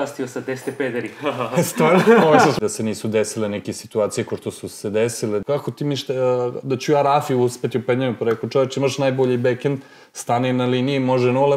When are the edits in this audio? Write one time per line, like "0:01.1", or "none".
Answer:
0:02.6
0:05.4